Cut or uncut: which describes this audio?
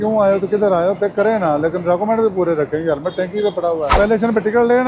cut